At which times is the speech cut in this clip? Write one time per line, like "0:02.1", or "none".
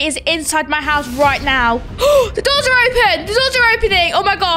0:01.9